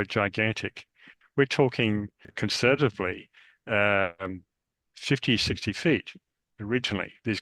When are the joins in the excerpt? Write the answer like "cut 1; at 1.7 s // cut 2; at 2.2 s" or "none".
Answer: cut 1; at 2.3 s